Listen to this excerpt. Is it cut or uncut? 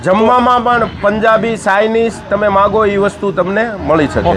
uncut